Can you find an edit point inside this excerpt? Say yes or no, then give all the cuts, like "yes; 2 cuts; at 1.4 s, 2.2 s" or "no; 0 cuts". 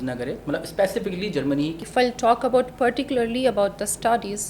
yes; 1 cut; at 1.8 s